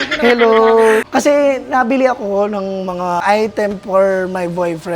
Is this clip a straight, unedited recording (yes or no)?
no